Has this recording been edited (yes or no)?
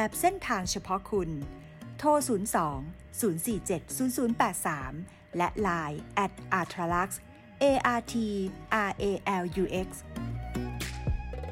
yes